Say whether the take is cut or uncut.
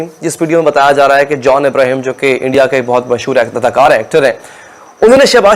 uncut